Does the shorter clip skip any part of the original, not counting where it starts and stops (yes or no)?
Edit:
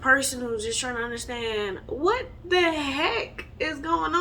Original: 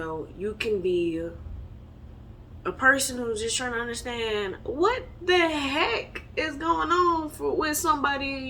no